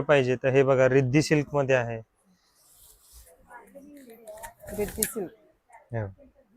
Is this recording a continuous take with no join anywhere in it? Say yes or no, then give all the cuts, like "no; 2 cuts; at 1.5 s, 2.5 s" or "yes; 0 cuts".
yes; 0 cuts